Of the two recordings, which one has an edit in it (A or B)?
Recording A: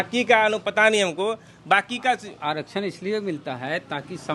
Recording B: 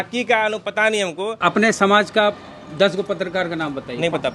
B